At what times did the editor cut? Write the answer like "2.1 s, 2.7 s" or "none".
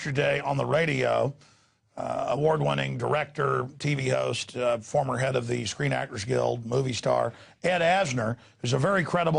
3.0 s